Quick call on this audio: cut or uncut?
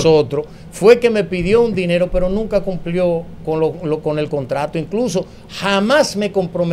uncut